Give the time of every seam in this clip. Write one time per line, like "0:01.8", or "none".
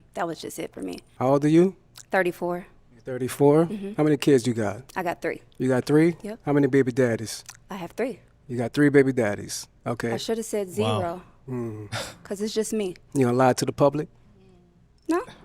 0:01.1